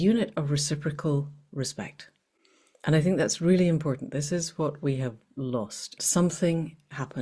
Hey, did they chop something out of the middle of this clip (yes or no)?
yes